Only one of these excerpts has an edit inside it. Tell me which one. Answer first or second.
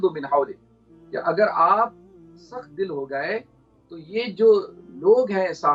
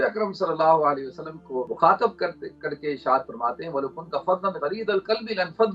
second